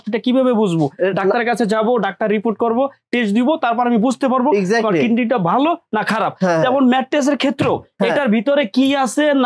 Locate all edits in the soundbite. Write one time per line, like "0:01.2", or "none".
none